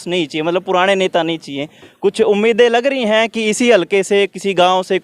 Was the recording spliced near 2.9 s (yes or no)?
no